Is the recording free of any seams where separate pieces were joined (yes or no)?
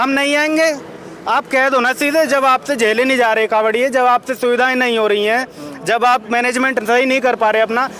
yes